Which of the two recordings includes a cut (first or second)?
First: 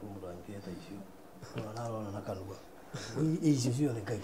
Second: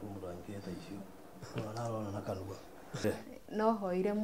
second